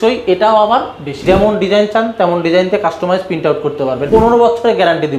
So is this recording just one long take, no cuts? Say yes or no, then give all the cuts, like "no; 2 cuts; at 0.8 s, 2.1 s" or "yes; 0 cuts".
no; 2 cuts; at 1.1 s, 4.0 s